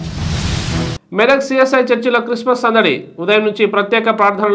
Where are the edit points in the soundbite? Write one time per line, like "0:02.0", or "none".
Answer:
none

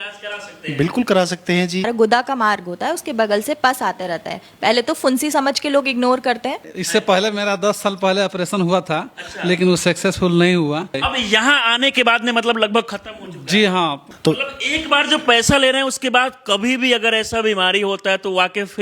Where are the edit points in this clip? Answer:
0:01.9
0:06.7
0:11.0
0:14.1

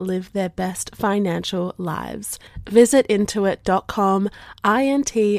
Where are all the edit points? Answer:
none

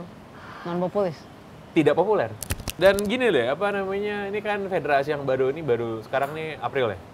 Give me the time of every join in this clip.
0:02.7

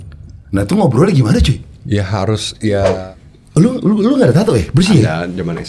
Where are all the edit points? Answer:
0:03.0

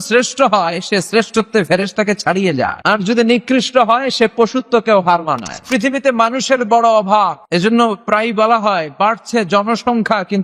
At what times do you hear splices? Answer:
0:02.8
0:05.6
0:07.4

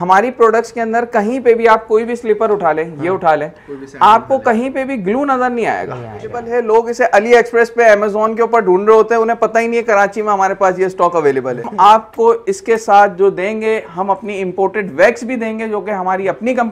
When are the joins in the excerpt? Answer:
0:06.4
0:11.7

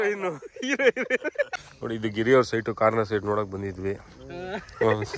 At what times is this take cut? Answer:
0:01.6

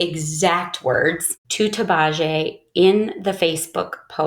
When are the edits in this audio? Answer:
none

